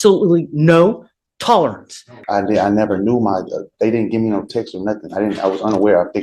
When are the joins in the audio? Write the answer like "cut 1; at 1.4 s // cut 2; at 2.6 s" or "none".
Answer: cut 1; at 2.1 s